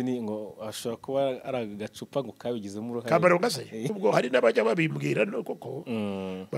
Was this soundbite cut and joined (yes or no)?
yes